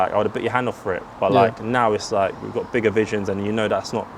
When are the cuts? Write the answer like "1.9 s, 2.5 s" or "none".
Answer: none